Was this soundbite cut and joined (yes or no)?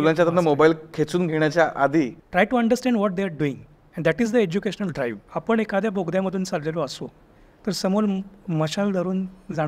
yes